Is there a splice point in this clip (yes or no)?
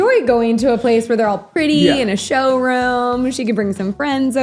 no